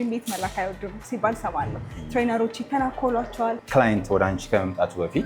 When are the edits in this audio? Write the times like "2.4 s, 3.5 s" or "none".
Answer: 3.6 s